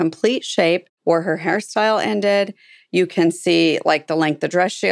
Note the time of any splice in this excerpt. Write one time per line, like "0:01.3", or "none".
0:00.9